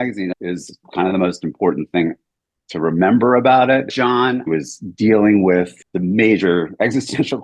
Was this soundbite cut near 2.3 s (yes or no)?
no